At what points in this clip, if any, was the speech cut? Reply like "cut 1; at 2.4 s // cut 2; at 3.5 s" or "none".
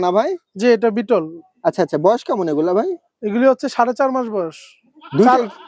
none